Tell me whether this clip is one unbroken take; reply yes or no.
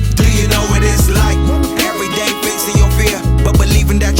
yes